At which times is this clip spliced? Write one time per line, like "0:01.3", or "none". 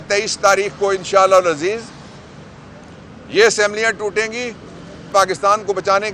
0:05.1

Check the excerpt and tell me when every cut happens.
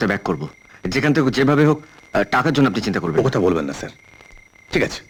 none

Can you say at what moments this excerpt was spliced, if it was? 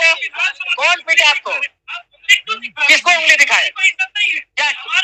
none

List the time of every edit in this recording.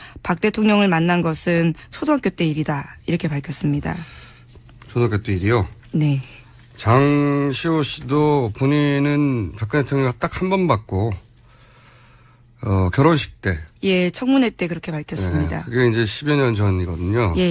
0:11.8

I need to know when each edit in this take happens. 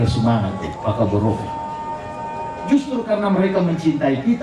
none

